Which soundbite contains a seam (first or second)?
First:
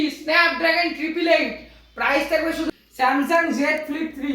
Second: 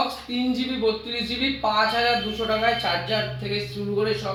first